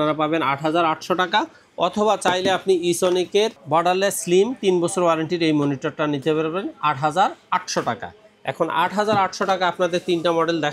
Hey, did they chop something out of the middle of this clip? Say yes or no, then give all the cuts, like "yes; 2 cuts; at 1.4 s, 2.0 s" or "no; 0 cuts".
no; 0 cuts